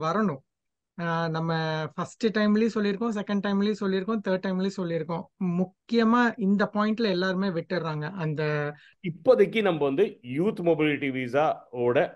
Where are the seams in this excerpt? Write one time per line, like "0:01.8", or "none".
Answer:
0:08.9